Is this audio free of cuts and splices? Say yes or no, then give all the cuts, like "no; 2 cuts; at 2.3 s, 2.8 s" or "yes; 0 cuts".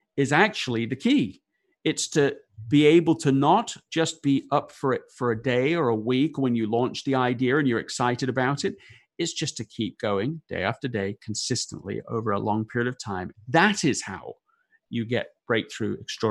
no; 1 cut; at 13.3 s